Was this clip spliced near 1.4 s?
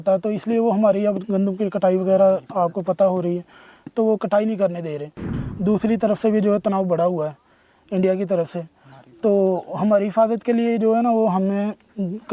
no; 1 cut; at 5.3 s

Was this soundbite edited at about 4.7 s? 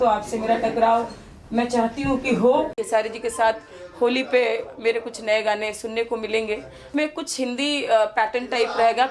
no; 2 cuts; at 2.8 s, 6.8 s

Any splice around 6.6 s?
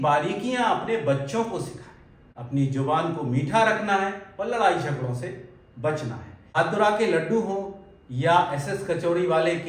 yes; 2 cuts; at 2.4 s, 6.6 s

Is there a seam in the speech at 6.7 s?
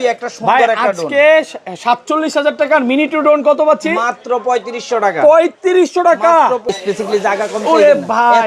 yes; 1 cut; at 6.7 s

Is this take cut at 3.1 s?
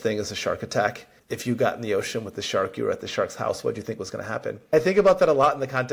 no; 1 cut; at 4.7 s

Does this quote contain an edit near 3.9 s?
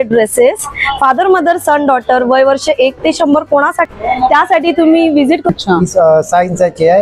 yes; 2 cuts; at 3.9 s, 5.5 s

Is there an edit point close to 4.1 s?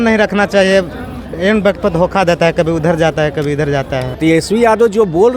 yes; 1 cut; at 4.1 s

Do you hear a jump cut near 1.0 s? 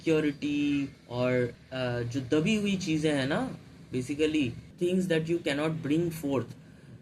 yes; 3 cuts; at 1.0 s, 1.6 s, 4.6 s

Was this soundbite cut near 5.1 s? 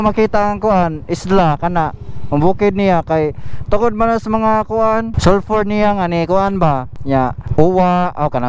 yes; 2 cuts; at 5.1 s, 7.0 s

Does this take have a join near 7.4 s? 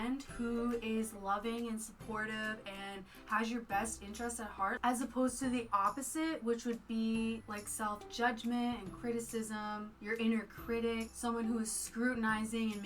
yes; 4 cuts; at 4.8 s, 7.4 s, 9.9 s, 11.1 s

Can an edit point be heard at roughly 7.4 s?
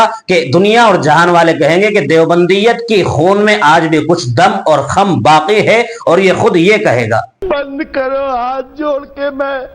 yes; 1 cut; at 7.4 s

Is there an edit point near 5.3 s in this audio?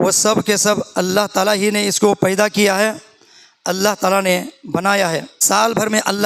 yes; 1 cut; at 5.3 s

